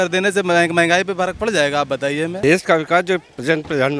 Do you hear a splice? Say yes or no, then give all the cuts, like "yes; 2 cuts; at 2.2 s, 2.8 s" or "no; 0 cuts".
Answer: yes; 1 cut; at 2.4 s